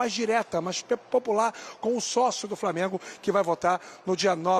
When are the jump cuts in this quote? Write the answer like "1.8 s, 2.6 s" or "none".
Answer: none

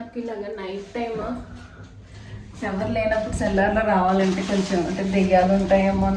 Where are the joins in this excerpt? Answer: none

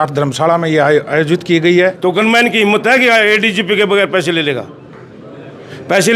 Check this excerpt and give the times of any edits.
2.0 s

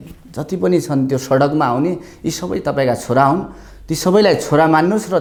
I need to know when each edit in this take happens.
none

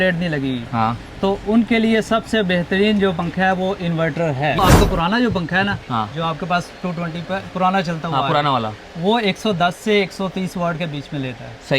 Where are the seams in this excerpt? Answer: 4.6 s

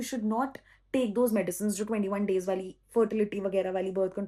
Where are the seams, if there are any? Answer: none

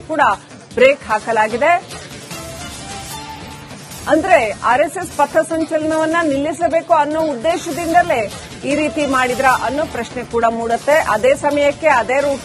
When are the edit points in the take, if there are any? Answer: none

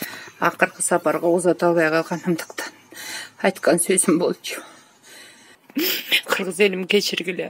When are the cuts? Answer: 5.5 s

